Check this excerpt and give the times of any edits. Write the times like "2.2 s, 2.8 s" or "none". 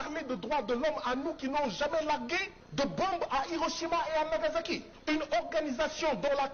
2.6 s, 4.9 s